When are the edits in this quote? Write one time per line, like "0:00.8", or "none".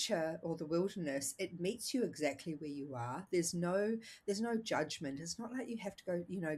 none